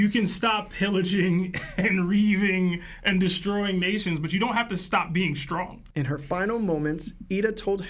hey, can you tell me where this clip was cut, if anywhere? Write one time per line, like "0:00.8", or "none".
0:05.8